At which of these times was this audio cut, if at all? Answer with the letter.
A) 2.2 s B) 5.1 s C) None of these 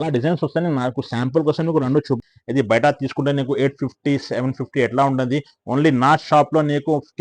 A